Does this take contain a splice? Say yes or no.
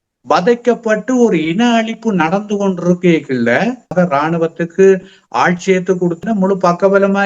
yes